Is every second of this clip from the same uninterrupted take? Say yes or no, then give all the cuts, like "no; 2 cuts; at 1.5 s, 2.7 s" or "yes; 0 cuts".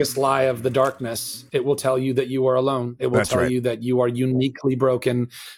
yes; 0 cuts